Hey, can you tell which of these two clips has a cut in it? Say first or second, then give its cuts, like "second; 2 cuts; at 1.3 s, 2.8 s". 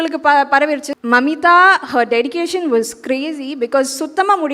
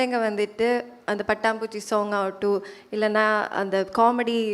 first; 1 cut; at 0.9 s